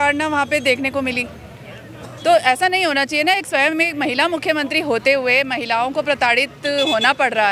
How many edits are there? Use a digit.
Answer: 0